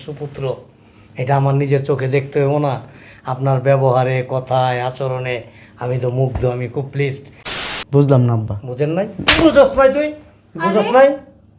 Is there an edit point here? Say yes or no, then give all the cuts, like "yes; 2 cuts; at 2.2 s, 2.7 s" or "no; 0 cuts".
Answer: yes; 1 cut; at 7.6 s